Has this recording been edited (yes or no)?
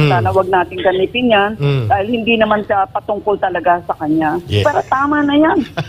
yes